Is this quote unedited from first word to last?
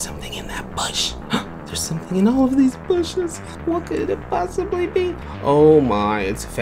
no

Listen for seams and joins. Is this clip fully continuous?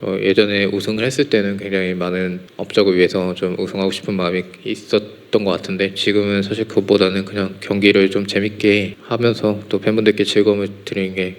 no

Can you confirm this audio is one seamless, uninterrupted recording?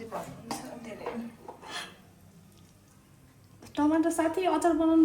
yes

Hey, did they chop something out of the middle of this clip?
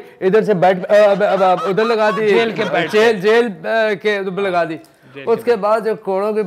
no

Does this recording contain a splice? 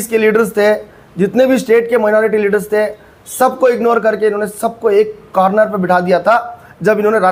no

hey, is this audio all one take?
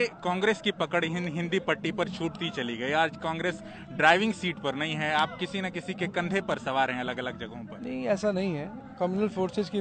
yes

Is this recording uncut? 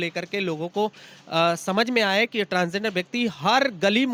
yes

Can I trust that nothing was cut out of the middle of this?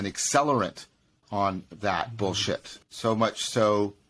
no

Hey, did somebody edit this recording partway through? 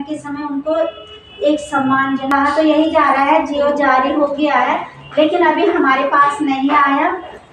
yes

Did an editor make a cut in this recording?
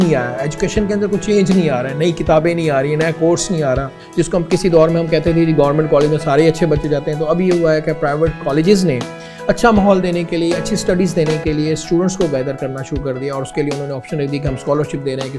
yes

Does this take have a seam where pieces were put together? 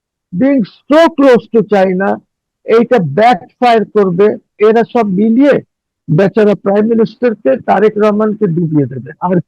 yes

